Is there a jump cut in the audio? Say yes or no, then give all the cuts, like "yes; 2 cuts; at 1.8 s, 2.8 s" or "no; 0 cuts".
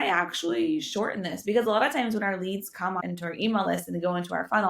yes; 1 cut; at 3.1 s